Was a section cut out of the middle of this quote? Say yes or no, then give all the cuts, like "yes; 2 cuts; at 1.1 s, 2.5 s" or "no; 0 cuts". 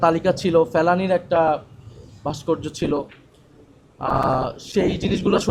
no; 0 cuts